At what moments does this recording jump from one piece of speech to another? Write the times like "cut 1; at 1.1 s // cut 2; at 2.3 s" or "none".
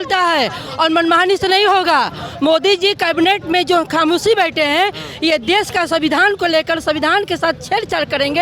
none